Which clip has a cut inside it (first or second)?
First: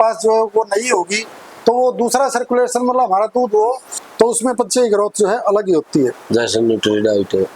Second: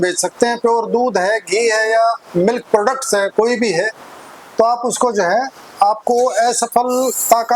first